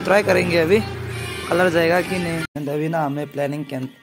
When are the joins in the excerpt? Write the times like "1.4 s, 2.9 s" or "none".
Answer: 2.5 s